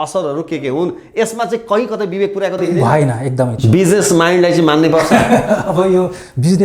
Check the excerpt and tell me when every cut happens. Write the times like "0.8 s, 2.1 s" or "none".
3.5 s

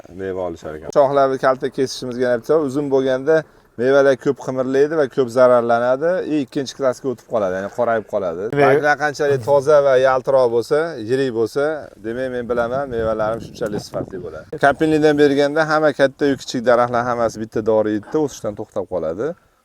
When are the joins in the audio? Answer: 0.9 s, 8.5 s, 14.5 s

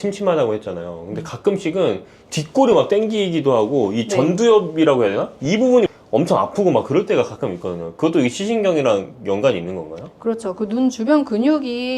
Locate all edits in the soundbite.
none

